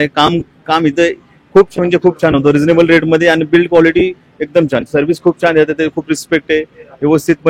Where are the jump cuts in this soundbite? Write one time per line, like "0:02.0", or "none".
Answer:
none